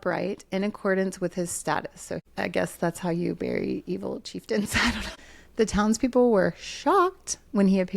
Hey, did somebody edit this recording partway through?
yes; 2 cuts; at 2.2 s, 5.4 s

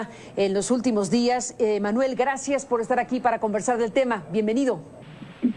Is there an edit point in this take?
yes; 1 cut; at 1.5 s

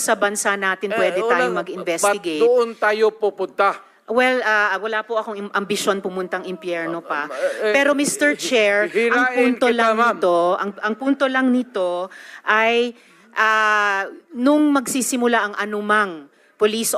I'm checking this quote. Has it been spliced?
no; 0 cuts

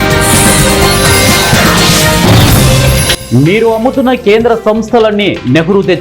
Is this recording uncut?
no; 1 cut; at 3.1 s

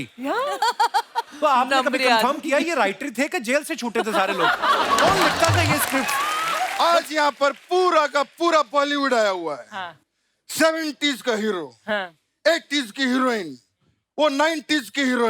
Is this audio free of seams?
no; 1 cut; at 6.7 s

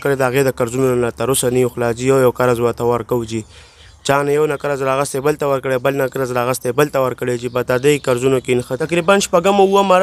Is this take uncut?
no; 1 cut; at 8.7 s

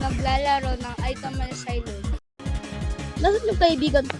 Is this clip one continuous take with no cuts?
no; 1 cut; at 2.3 s

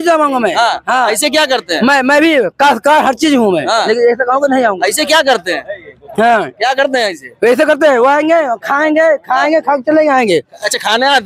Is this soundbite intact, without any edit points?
yes; 0 cuts

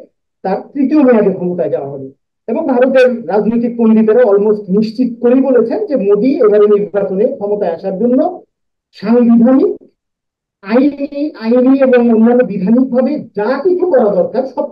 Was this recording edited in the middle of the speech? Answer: no; 0 cuts

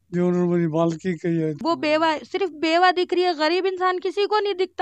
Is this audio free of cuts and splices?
no; 1 cut; at 1.6 s

